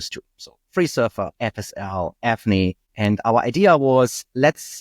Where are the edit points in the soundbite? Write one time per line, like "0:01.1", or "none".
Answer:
0:02.9